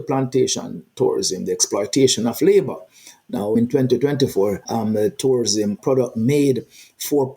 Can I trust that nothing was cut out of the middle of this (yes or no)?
no